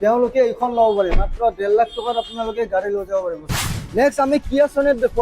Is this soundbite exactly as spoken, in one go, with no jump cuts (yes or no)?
no